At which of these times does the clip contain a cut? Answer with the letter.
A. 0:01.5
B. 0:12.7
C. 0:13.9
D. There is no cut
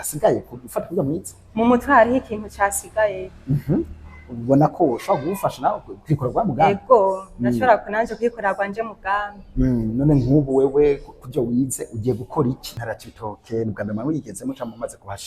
B